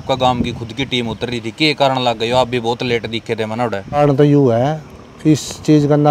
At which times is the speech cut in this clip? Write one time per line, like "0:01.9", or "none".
0:04.0

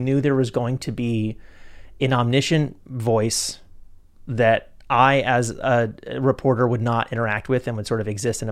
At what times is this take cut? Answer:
none

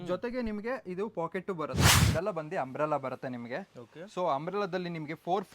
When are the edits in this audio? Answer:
0:01.8

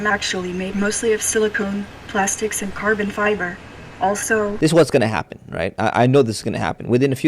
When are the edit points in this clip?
0:04.5

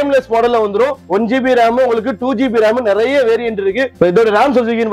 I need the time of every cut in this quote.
0:01.0
0:03.9

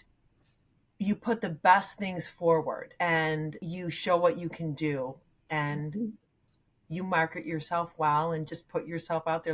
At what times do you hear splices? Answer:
0:02.9
0:03.6

